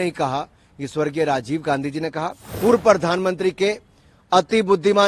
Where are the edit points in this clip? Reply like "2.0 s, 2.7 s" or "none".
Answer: 2.4 s